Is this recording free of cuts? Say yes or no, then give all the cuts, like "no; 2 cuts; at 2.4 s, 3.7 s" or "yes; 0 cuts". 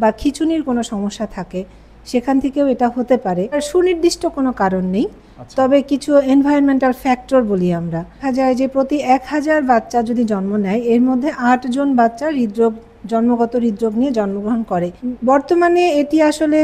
no; 3 cuts; at 3.6 s, 8.2 s, 15.0 s